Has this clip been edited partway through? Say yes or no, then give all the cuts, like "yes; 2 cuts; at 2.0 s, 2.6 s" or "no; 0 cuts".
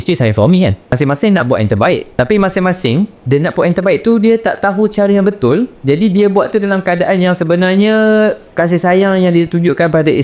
yes; 5 cuts; at 0.9 s, 2.1 s, 3.2 s, 5.7 s, 8.4 s